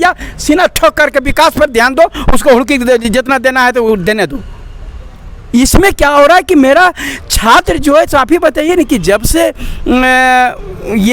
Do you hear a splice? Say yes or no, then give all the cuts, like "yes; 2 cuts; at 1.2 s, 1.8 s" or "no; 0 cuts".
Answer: no; 0 cuts